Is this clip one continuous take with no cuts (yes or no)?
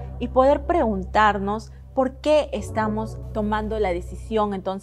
no